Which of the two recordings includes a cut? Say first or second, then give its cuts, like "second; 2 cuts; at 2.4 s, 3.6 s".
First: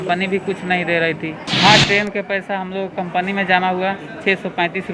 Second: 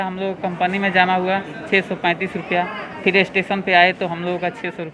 first; 1 cut; at 1.4 s